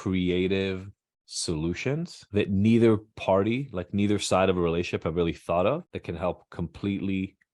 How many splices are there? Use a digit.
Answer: 1